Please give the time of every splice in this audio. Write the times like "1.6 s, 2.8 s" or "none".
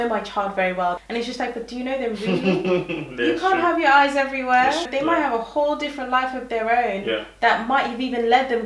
1.0 s, 4.9 s